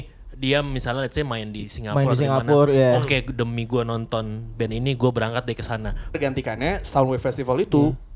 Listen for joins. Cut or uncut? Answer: cut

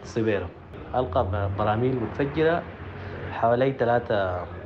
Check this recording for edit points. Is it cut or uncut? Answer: uncut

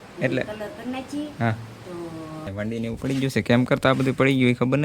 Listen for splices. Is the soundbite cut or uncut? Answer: cut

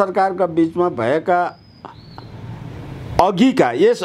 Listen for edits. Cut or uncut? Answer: uncut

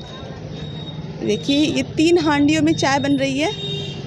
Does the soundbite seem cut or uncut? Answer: uncut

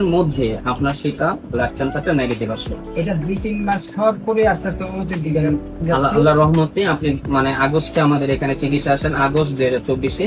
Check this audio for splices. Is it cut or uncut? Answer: uncut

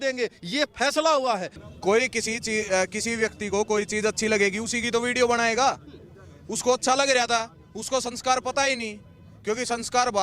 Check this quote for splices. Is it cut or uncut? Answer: cut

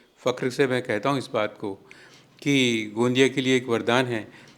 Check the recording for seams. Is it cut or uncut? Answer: uncut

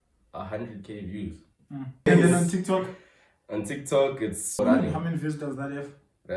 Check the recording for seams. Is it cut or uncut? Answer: cut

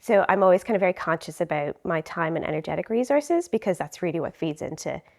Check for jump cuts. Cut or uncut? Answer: uncut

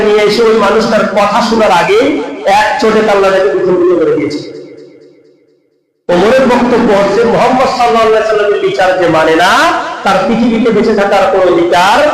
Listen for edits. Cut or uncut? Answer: uncut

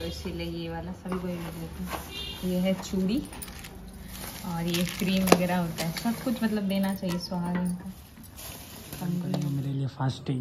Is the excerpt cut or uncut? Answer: cut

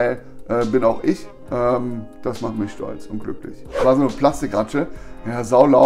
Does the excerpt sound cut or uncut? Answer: cut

